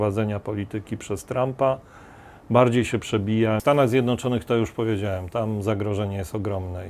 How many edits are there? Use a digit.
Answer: 1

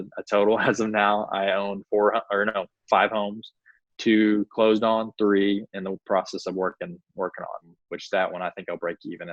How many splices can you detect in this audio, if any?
1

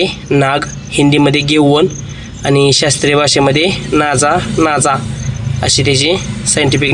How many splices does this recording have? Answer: 0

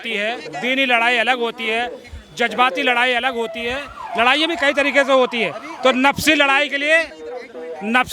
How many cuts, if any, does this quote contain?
0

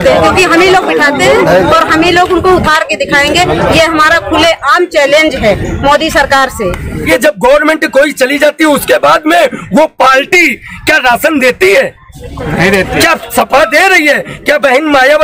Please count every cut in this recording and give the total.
1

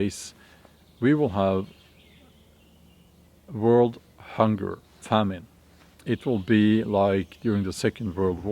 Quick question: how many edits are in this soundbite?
2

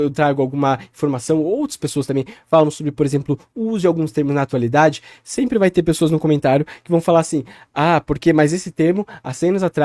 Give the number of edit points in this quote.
0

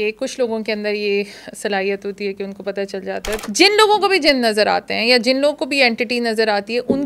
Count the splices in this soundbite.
1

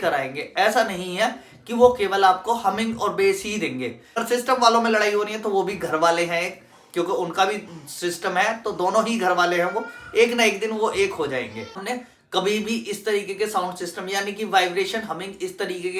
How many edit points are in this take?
2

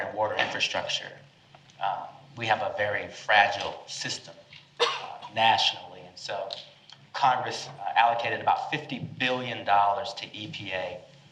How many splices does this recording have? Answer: 0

